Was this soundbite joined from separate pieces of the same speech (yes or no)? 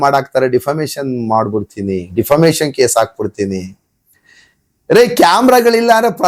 no